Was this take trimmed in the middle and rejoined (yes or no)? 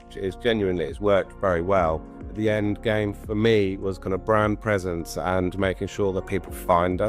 yes